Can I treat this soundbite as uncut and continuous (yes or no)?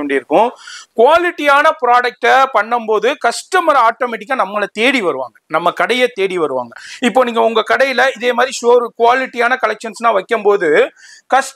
yes